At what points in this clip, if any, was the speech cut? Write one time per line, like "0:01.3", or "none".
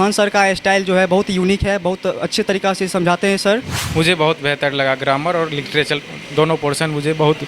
0:03.8